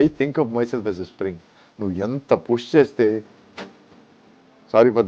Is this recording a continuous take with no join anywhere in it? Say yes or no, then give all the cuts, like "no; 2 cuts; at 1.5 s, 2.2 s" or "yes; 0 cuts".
yes; 0 cuts